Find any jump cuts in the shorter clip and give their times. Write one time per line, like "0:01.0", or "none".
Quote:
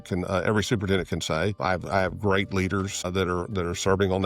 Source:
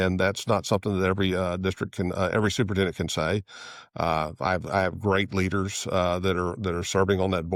0:01.6
0:03.1